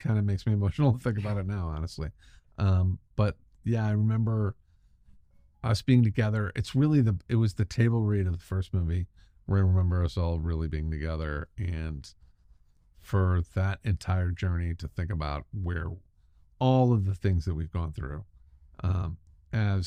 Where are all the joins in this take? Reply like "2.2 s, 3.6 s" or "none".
none